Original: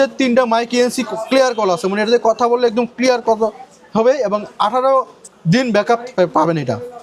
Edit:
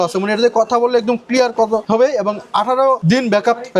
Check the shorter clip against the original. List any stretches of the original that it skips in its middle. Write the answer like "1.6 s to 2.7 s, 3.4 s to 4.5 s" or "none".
3.5 s to 3.9 s, 5.1 s to 5.4 s